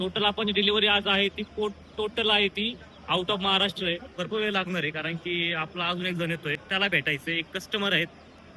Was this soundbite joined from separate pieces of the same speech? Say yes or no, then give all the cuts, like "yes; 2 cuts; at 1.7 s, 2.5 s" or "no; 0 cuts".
yes; 2 cuts; at 4.1 s, 6.6 s